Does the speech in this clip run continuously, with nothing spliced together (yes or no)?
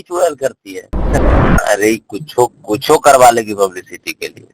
no